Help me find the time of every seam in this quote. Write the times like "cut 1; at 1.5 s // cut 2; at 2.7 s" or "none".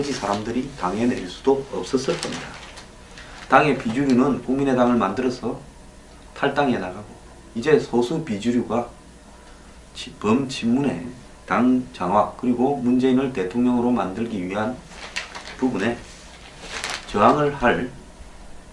none